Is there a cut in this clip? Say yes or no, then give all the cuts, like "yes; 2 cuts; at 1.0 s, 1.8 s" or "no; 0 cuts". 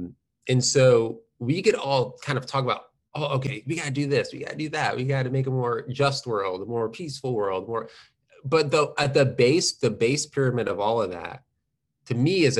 no; 0 cuts